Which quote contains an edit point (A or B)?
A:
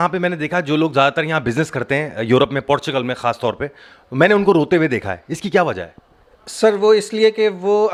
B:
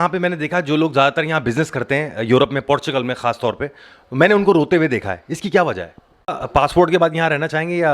B